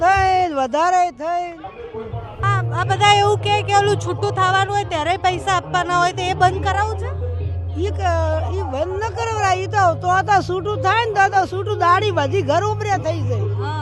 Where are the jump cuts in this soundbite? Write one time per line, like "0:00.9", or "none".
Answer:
0:02.4